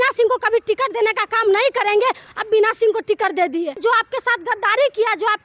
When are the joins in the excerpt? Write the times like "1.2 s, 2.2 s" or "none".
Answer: 2.3 s, 3.8 s